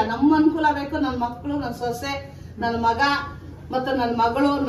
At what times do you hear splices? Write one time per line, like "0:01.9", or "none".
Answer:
none